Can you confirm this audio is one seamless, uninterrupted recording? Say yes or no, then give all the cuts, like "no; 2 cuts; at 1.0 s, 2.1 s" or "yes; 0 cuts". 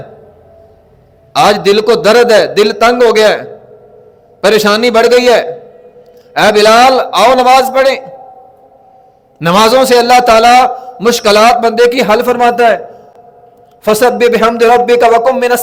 yes; 0 cuts